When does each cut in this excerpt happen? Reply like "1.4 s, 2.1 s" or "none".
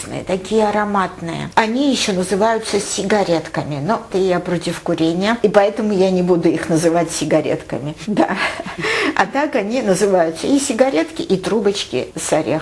1.5 s, 4.1 s, 8.0 s